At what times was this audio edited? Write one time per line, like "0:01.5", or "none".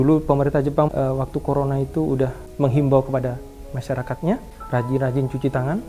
0:00.9
0:02.4
0:04.5